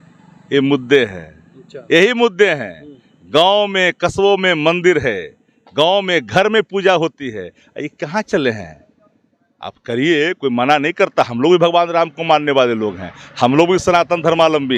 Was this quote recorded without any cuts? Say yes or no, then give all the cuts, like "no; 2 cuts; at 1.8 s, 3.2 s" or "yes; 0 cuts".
yes; 0 cuts